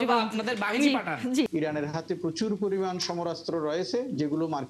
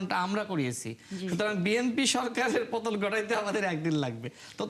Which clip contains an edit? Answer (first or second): first